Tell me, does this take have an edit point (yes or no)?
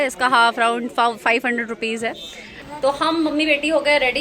yes